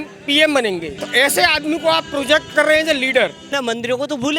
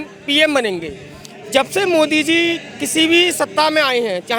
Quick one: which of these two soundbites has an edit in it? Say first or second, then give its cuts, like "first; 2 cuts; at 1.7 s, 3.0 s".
first; 2 cuts; at 1.0 s, 3.5 s